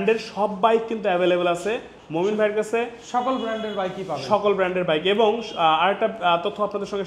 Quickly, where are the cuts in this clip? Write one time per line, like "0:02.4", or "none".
none